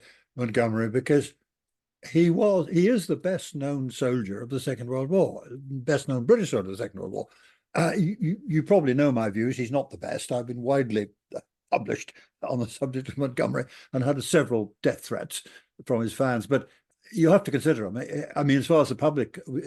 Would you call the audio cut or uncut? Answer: uncut